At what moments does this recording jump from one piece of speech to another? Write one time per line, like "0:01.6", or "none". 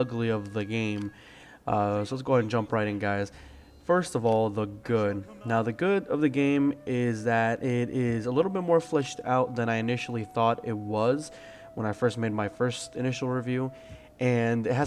0:06.1